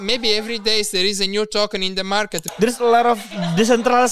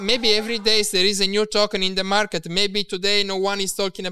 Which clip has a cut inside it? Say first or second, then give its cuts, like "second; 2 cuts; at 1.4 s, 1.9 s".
first; 1 cut; at 2.4 s